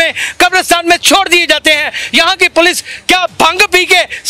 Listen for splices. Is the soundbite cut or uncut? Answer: uncut